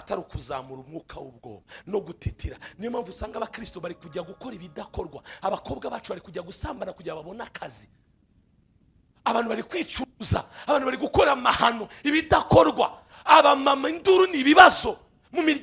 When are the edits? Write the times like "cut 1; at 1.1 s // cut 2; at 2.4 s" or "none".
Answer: none